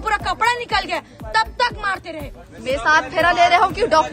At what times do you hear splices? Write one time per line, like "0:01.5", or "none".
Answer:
0:02.4